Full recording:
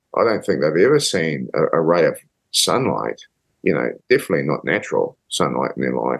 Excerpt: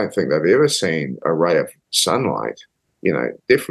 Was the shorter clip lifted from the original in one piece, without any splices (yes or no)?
no